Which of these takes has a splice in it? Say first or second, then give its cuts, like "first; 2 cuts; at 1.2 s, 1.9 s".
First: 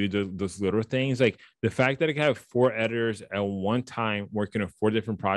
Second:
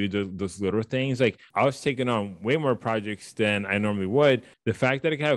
second; 2 cuts; at 1.5 s, 4.5 s